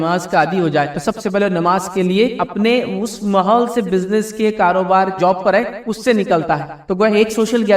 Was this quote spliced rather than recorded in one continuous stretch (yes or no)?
yes